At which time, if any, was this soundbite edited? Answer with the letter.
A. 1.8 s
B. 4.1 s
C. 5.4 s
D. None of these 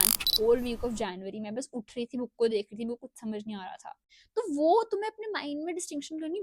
B